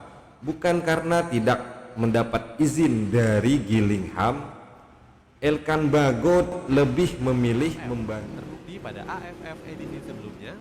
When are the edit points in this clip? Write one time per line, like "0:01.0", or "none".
0:08.2